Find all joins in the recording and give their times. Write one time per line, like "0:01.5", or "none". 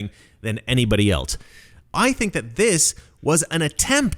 0:01.9